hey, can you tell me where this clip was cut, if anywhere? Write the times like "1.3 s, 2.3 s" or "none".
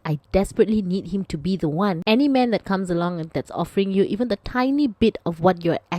2.0 s